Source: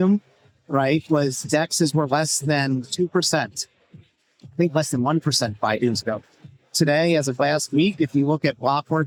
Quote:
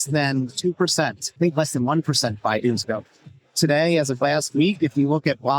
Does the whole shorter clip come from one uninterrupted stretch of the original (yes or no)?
no